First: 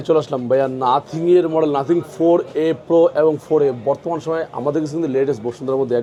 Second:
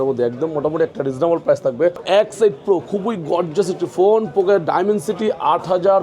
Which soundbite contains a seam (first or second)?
second